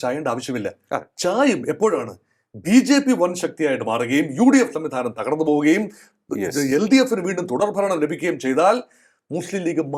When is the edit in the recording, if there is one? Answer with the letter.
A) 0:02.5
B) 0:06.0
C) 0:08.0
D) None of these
D